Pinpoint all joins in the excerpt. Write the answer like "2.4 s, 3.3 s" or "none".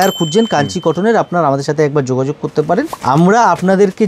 2.9 s